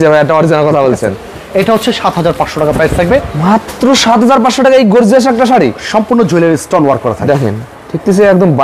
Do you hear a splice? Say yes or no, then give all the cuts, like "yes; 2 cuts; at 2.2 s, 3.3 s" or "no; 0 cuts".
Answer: no; 0 cuts